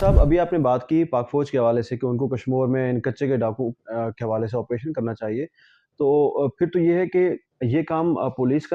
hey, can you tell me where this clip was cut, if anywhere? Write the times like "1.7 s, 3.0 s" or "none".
none